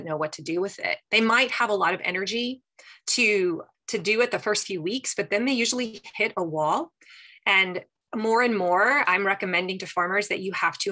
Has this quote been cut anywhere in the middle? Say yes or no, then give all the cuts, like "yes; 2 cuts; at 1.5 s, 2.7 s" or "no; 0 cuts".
yes; 1 cut; at 3.7 s